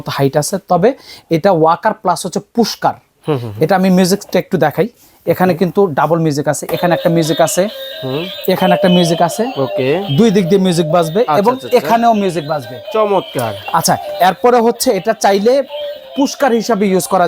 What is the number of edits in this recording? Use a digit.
0